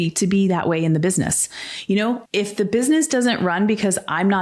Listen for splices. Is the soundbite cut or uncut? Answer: uncut